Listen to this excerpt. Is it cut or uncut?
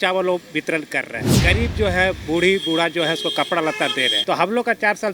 cut